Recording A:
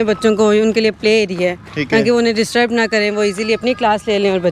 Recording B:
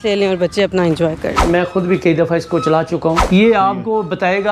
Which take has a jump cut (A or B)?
B